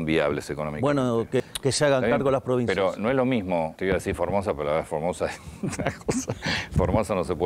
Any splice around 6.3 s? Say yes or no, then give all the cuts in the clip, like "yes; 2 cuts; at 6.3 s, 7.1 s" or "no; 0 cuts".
no; 2 cuts; at 1.4 s, 3.7 s